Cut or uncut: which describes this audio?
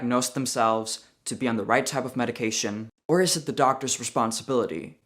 cut